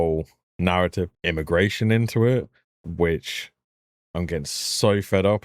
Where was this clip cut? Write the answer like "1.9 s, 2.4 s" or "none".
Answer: 1.2 s